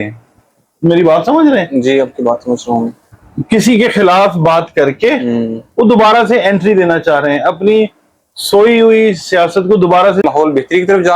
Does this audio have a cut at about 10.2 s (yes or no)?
yes